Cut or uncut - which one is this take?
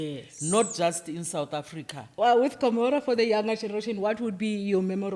cut